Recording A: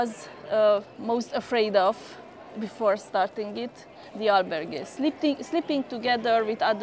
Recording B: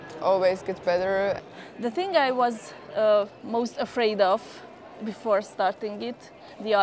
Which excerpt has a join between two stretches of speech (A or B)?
B